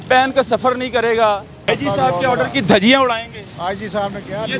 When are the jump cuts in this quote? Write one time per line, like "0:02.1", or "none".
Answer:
0:01.7